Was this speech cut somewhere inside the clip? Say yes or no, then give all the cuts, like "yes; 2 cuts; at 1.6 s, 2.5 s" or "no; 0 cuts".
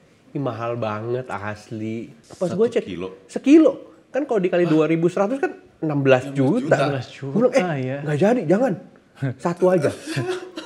yes; 1 cut; at 2.1 s